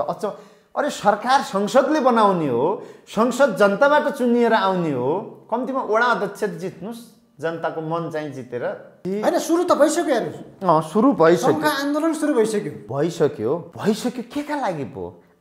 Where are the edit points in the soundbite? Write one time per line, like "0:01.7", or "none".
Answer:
0:08.9
0:12.8
0:13.7